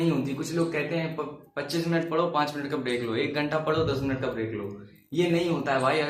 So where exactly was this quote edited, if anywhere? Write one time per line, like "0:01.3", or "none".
none

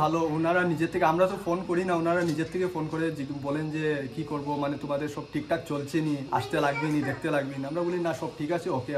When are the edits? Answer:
none

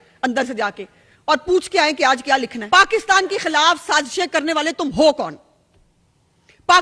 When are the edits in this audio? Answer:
0:02.6

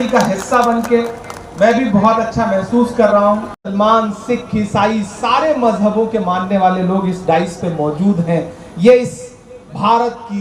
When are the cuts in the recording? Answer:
0:03.6

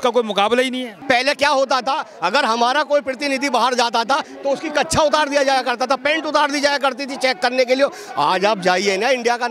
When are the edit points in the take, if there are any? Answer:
0:00.9

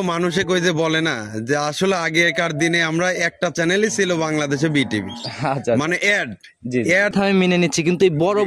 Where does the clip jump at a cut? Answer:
0:07.1

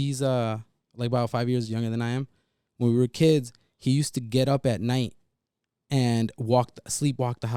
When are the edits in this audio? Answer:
none

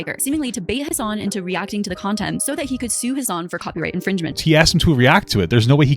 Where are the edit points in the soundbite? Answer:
0:00.9
0:04.3

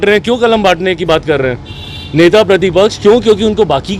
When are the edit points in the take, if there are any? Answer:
none

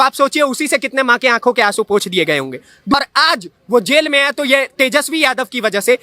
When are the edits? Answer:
0:02.9

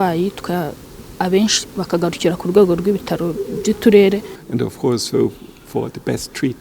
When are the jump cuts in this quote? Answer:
0:04.4

